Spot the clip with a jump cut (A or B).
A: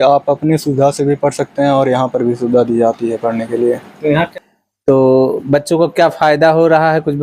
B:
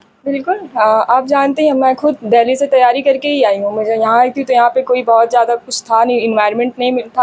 A